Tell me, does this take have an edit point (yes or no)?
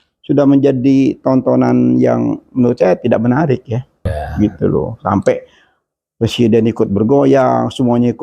yes